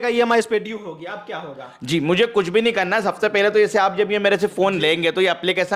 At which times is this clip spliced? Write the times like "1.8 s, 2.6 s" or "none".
none